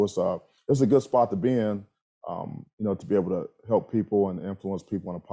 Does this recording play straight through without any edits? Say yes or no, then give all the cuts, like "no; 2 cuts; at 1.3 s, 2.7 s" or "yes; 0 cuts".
yes; 0 cuts